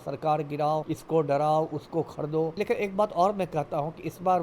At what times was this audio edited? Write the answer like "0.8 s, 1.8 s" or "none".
0.9 s, 2.5 s